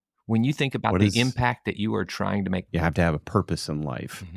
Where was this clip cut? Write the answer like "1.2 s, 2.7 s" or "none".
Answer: 2.7 s